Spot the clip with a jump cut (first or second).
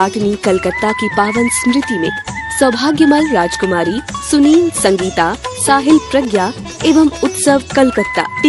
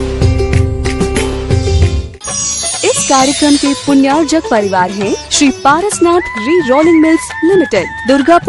second